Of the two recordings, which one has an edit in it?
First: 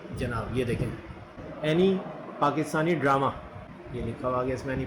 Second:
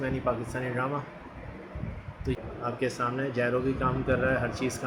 second; 1 cut; at 2.4 s

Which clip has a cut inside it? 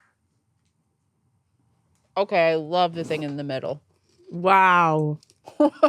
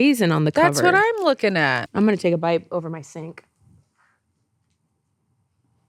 second; 1 cut; at 1.8 s

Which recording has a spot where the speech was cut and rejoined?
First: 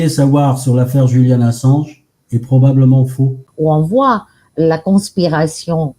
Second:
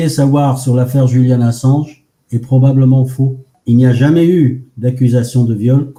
first; 1 cut; at 3.4 s

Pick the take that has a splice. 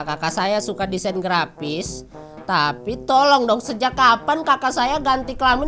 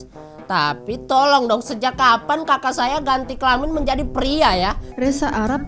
second; 1 cut; at 4.6 s

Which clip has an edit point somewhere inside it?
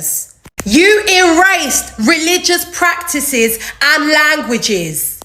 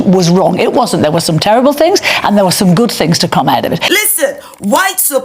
second; 1 cut; at 3.8 s

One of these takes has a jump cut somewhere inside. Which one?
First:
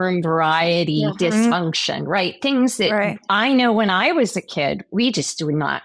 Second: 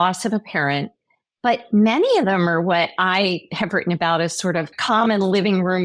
second; 1 cut; at 4.8 s

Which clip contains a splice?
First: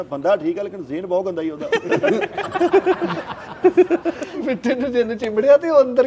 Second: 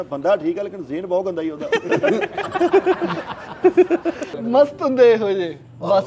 second; 1 cut; at 4.4 s

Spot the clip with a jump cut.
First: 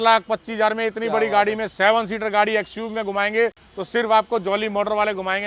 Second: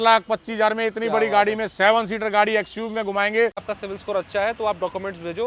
second; 1 cut; at 3.7 s

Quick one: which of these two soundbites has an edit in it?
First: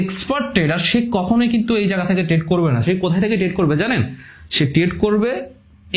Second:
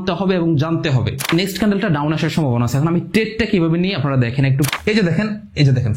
second; 2 cuts; at 1.3 s, 4.7 s

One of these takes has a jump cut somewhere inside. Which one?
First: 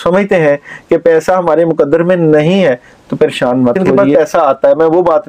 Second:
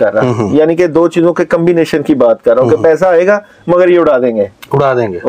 first; 1 cut; at 3.9 s

